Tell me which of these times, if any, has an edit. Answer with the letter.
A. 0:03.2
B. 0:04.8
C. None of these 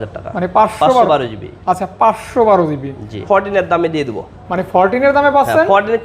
A